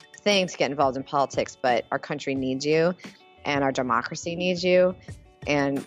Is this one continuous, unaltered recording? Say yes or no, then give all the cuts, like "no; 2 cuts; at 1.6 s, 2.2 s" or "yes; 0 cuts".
yes; 0 cuts